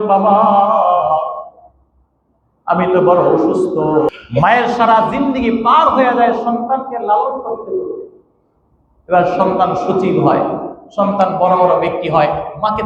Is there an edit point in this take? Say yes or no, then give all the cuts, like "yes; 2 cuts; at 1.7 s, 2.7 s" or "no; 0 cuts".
yes; 1 cut; at 4.1 s